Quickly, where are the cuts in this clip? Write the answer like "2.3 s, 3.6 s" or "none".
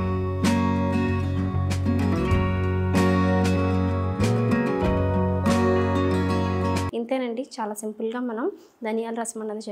6.9 s